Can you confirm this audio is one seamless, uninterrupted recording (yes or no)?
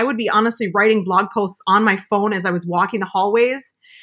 yes